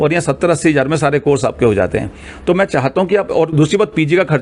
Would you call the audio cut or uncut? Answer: uncut